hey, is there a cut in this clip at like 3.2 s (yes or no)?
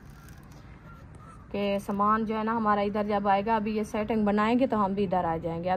no